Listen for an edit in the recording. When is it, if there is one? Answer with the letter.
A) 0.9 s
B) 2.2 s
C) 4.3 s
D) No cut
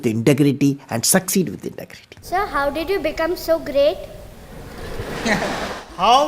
B